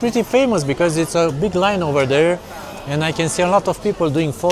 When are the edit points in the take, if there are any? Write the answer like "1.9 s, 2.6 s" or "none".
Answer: none